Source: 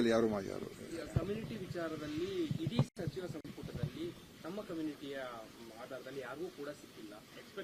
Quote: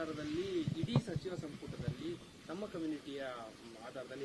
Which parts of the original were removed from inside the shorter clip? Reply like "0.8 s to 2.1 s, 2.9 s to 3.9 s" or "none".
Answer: 3.2 s to 3.3 s